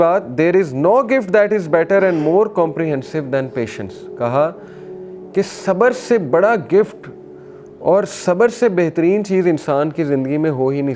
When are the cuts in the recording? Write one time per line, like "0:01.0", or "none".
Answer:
none